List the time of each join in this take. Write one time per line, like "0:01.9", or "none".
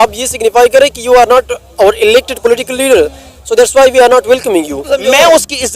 0:04.8